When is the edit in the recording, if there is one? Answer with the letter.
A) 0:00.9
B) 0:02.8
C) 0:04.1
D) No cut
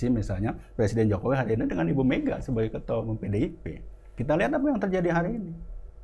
C